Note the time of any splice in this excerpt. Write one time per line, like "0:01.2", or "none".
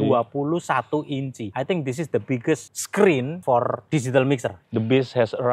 0:01.4
0:02.7
0:03.4
0:04.6